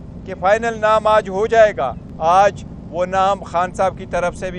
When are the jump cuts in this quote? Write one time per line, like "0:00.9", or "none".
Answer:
0:02.0